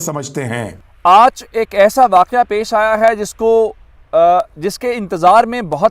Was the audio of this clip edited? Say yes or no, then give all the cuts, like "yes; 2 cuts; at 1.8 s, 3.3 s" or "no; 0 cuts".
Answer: yes; 1 cut; at 0.9 s